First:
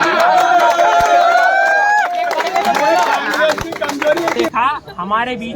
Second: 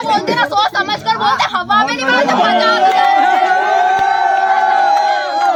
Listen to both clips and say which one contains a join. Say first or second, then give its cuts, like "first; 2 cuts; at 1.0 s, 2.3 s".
first; 1 cut; at 4.5 s